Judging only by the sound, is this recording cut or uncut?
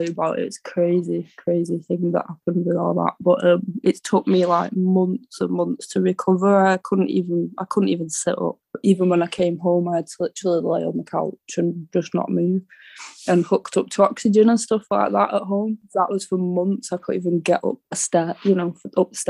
cut